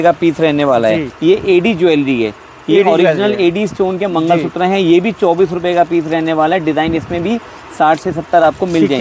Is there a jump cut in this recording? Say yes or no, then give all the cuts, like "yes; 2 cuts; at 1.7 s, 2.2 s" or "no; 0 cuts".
yes; 1 cut; at 1.1 s